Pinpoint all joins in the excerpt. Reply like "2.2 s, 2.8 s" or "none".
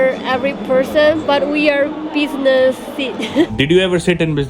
3.5 s